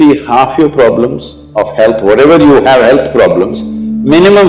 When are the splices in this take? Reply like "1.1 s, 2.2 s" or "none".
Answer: none